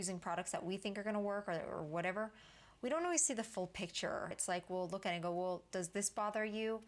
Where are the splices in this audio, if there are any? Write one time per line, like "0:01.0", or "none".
0:04.4